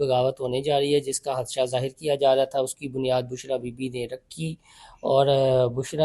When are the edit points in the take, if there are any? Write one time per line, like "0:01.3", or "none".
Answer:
none

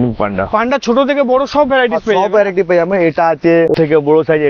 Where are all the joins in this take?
none

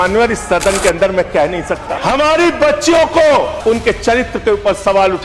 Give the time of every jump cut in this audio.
0:01.9
0:03.5

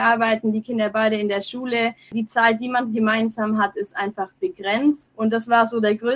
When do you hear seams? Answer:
0:02.1
0:05.1

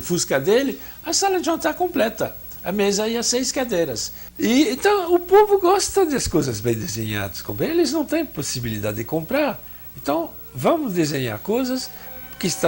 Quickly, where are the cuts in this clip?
0:04.2

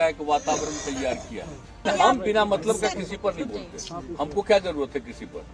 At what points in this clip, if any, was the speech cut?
0:01.9

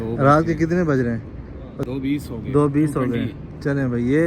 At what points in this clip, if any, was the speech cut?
0:01.7

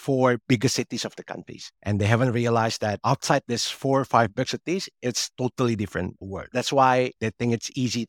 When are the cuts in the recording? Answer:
0:06.5
0:07.1

